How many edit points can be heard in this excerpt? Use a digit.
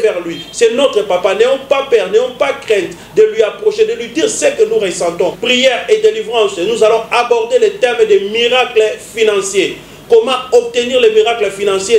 1